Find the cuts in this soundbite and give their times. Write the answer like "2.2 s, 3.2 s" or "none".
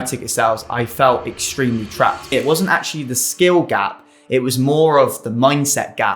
2.3 s